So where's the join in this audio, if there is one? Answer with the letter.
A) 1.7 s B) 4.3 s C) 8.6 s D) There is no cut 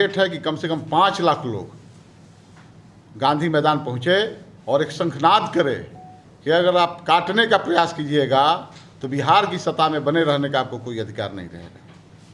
D